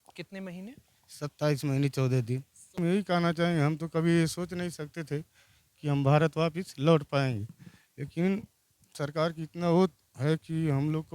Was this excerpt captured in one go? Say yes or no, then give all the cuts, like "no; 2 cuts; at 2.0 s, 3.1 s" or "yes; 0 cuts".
no; 1 cut; at 2.8 s